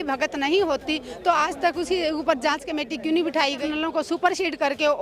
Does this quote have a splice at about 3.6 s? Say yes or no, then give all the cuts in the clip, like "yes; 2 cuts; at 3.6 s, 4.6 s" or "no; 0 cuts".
yes; 1 cut; at 3.6 s